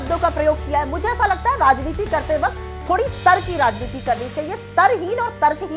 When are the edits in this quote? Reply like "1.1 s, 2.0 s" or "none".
none